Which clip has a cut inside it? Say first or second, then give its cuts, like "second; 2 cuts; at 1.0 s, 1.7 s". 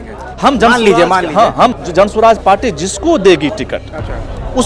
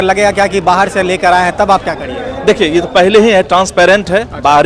first; 1 cut; at 1.7 s